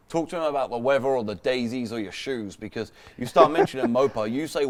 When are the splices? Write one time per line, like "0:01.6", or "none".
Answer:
none